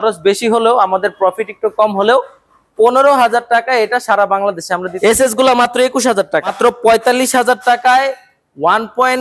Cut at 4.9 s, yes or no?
yes